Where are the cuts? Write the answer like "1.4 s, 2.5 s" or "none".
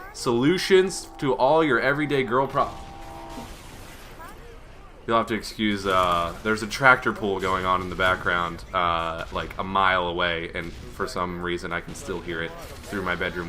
9.5 s